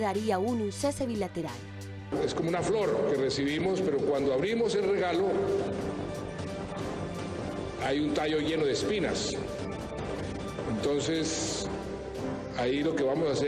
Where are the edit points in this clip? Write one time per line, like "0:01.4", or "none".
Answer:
0:09.5